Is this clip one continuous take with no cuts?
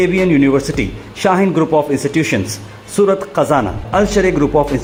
yes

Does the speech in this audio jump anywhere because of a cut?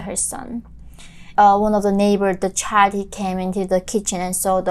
yes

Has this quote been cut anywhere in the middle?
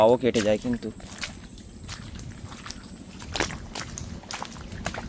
no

